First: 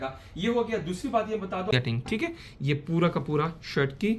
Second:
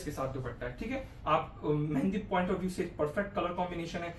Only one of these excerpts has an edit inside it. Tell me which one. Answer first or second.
first